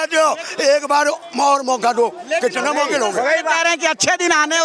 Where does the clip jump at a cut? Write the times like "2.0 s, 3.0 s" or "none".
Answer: none